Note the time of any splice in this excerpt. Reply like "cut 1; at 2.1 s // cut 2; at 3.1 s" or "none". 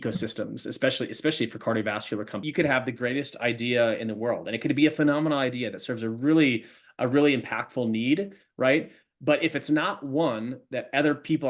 cut 1; at 2.4 s